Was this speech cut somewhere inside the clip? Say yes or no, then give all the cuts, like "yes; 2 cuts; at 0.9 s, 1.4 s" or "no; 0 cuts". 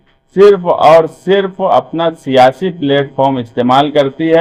no; 0 cuts